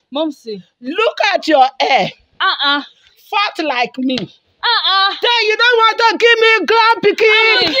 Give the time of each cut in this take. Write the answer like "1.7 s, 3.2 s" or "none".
none